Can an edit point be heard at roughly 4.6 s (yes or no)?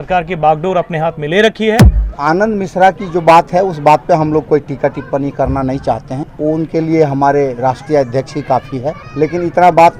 no